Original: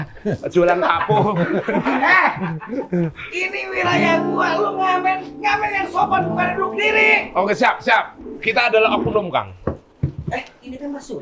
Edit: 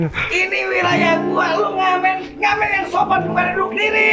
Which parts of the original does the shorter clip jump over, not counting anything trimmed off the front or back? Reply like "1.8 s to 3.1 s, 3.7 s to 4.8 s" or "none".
none